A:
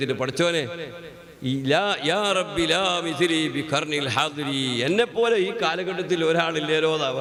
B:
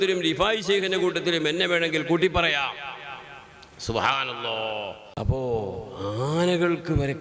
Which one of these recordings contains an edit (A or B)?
B